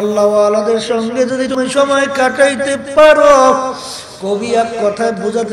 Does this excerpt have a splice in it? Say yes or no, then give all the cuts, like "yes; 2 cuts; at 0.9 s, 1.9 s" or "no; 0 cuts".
yes; 1 cut; at 1.5 s